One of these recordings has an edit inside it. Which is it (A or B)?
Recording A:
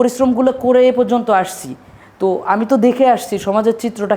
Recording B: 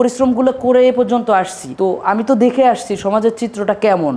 B